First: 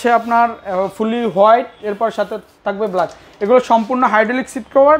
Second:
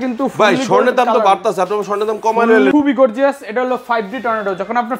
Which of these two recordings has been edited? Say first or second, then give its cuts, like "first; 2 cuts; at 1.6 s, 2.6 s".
second; 1 cut; at 2.7 s